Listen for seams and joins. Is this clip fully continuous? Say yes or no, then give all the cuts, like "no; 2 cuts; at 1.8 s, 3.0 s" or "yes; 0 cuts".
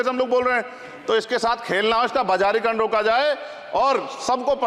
yes; 0 cuts